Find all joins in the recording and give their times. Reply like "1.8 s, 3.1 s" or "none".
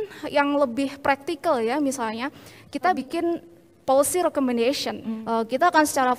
3.0 s, 5.1 s